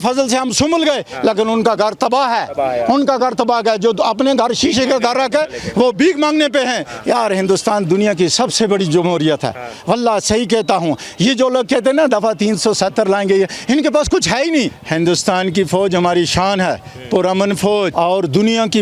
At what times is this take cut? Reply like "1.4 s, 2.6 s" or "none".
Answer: 6.9 s, 14.8 s, 17.9 s